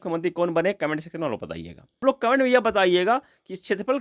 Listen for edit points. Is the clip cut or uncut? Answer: cut